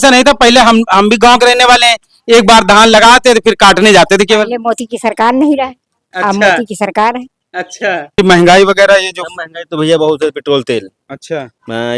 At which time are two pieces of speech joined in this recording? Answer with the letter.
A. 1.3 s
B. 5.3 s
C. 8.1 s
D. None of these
C